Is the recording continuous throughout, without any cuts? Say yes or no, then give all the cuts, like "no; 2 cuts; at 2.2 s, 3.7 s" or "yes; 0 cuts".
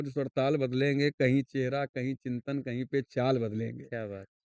yes; 0 cuts